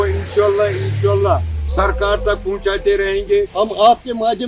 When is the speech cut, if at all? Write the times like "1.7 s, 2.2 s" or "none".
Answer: 3.5 s